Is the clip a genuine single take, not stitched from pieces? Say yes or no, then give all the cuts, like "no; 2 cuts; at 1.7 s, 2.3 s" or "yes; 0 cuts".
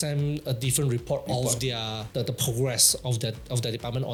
yes; 0 cuts